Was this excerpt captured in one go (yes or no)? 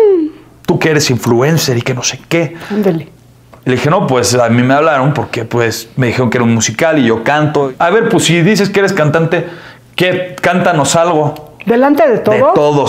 no